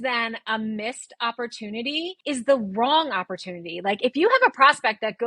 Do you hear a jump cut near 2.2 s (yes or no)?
yes